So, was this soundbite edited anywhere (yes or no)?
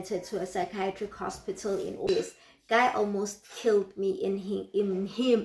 yes